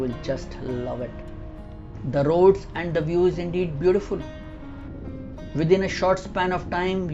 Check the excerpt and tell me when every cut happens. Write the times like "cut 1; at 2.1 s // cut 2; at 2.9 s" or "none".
cut 1; at 1.8 s // cut 2; at 4.8 s